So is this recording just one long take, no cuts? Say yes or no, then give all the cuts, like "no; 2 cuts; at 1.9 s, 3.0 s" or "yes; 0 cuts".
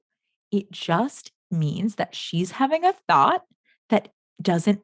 yes; 0 cuts